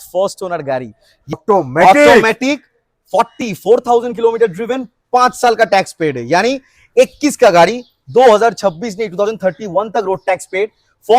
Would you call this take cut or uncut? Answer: cut